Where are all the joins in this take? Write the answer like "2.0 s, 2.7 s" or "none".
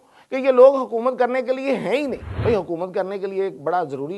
2.3 s